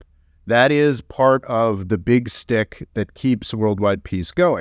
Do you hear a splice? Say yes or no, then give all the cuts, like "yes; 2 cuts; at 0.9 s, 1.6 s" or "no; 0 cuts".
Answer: no; 0 cuts